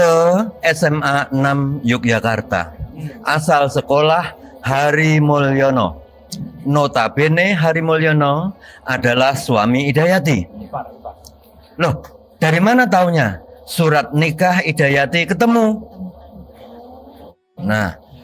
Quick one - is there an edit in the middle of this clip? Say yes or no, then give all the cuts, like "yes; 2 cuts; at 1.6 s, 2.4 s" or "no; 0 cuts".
no; 0 cuts